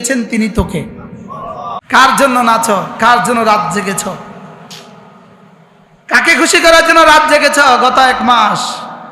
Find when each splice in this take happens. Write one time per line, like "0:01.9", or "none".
0:01.8